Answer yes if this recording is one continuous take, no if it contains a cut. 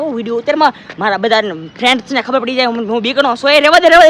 yes